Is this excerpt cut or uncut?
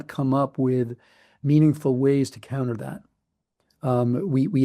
uncut